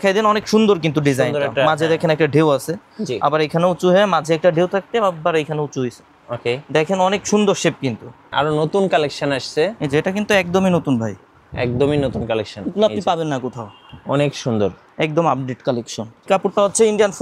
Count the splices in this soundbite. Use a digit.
2